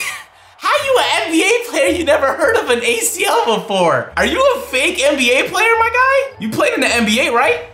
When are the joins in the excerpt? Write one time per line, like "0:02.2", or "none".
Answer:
none